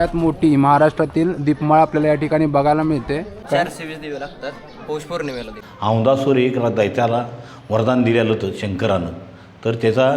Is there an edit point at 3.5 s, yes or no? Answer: yes